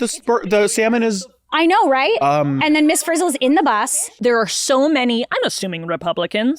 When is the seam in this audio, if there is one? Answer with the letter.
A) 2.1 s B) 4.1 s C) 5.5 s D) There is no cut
B